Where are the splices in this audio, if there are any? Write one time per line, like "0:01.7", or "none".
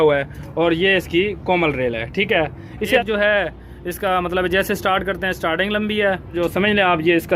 0:03.0
0:06.4